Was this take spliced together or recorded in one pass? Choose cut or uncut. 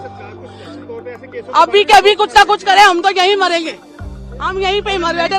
uncut